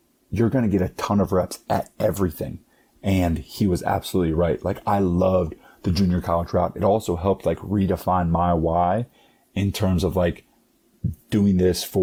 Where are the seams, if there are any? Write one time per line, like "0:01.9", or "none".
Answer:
none